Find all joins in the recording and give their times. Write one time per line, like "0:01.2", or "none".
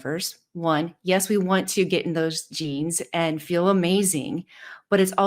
none